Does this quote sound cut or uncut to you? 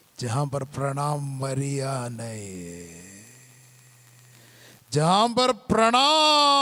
cut